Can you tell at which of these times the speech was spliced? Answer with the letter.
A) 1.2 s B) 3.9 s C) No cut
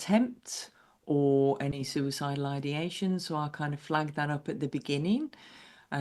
C